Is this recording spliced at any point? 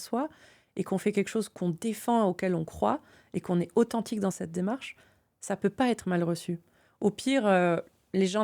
yes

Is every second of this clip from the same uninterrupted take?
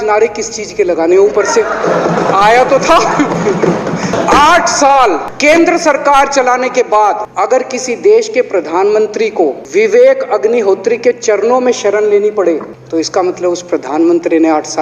no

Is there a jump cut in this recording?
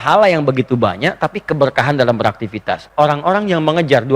yes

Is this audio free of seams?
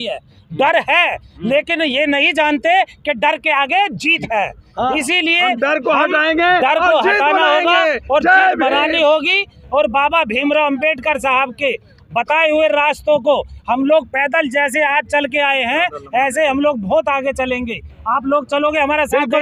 yes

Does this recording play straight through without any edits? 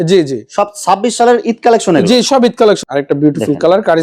no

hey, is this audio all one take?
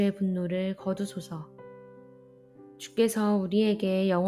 no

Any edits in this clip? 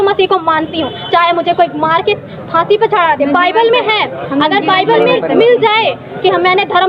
no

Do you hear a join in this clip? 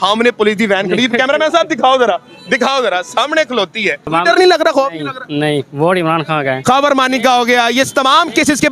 yes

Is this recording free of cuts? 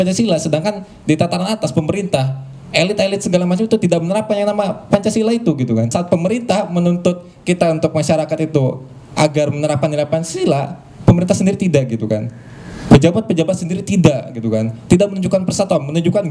no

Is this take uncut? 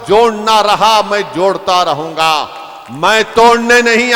yes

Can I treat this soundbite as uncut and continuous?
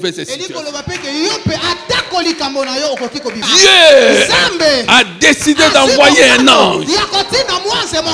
no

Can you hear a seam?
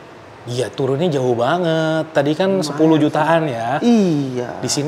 no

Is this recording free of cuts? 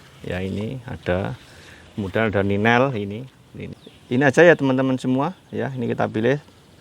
no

